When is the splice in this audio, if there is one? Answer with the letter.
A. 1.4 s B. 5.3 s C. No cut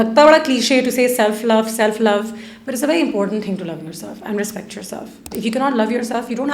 B